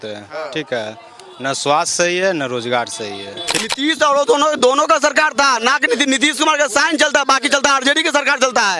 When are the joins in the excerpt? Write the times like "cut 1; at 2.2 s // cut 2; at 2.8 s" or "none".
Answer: cut 1; at 3.5 s